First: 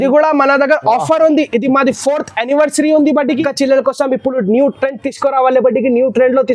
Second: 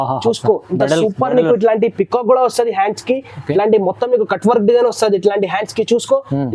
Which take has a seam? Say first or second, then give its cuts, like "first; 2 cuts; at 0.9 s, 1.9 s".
first; 1 cut; at 3.4 s